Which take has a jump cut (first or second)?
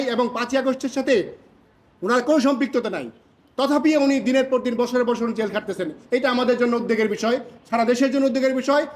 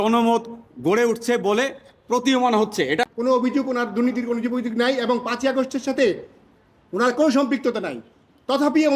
second